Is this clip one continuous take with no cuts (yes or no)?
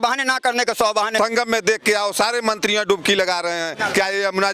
no